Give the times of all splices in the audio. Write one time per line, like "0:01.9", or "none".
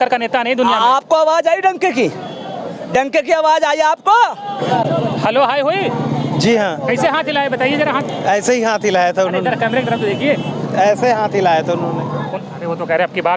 0:04.6
0:12.2